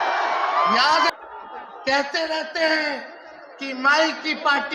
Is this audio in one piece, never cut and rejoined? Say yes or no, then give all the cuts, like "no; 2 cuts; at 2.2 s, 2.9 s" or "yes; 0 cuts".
no; 1 cut; at 1.1 s